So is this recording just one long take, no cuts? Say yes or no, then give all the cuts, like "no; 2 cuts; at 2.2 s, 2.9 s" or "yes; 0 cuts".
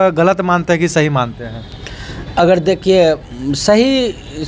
yes; 0 cuts